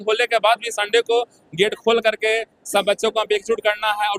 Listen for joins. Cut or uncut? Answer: uncut